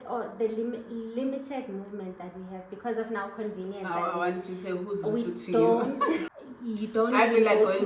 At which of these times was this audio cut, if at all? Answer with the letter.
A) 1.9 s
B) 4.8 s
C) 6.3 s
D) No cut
C